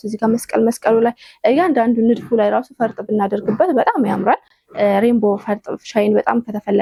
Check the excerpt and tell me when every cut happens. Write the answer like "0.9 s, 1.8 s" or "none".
none